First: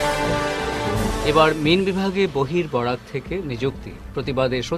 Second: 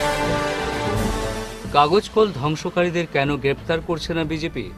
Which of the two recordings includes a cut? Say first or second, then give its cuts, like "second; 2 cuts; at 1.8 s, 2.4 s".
first; 1 cut; at 1.0 s